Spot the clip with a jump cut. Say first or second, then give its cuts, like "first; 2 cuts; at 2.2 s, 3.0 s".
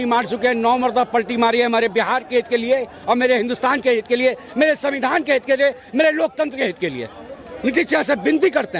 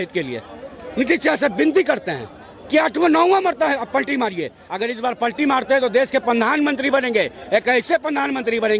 second; 1 cut; at 4.6 s